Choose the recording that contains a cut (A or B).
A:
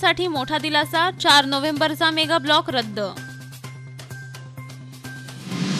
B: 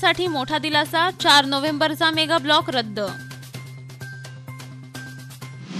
B